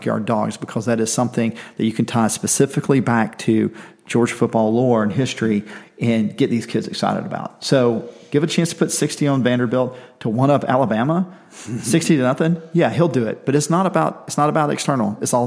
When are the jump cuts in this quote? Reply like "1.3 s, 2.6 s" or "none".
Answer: none

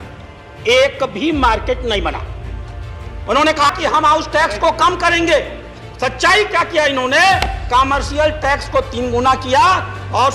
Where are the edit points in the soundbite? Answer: 3.7 s

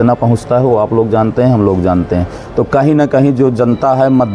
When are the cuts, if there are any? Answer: 2.4 s

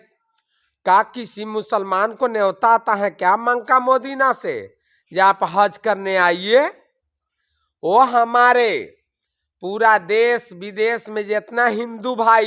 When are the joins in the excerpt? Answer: none

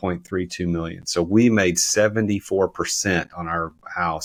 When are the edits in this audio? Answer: none

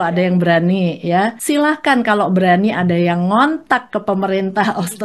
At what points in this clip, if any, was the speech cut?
1.4 s

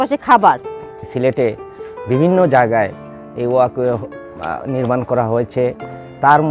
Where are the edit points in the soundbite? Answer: 0.9 s

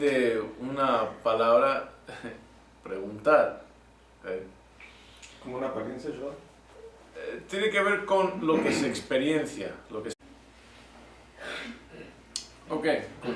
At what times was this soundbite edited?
none

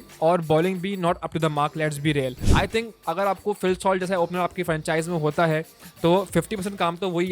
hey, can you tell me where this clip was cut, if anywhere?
2.4 s

